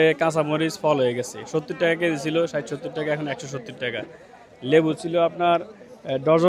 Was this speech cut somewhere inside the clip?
no; 0 cuts

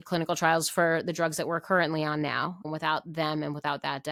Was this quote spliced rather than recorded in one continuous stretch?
no; 0 cuts

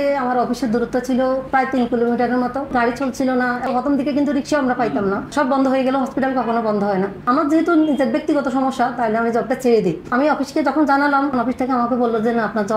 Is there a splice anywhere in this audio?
yes; 6 cuts; at 2.7 s, 3.7 s, 5.3 s, 7.2 s, 10.1 s, 11.3 s

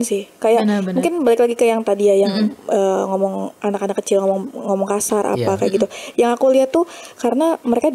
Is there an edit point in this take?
no; 0 cuts

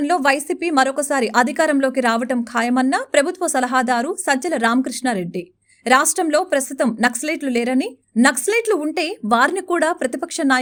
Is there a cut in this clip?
no; 0 cuts

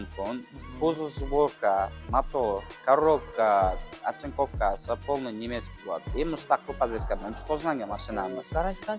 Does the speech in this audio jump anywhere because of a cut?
no; 0 cuts

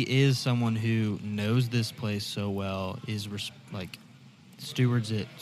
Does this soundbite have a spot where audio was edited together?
no; 0 cuts

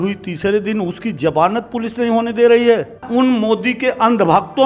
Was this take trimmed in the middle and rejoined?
yes; 1 cut; at 3.0 s

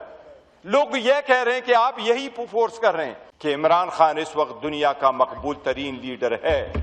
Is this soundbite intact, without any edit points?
no; 1 cut; at 3.2 s

